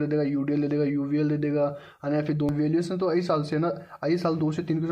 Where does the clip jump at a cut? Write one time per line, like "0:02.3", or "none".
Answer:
0:02.5